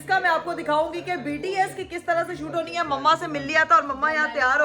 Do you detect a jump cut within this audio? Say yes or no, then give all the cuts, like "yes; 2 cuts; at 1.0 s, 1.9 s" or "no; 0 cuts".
no; 0 cuts